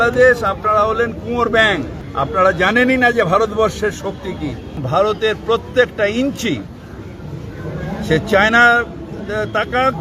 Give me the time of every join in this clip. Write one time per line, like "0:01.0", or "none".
0:02.0
0:04.7